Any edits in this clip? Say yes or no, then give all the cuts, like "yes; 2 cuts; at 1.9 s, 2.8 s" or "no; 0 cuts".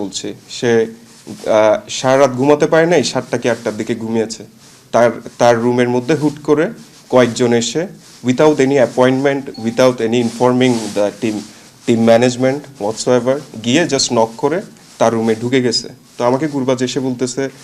no; 0 cuts